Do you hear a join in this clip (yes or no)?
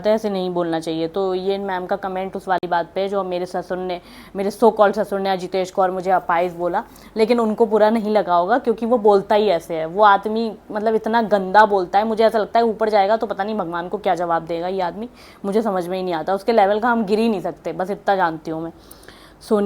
no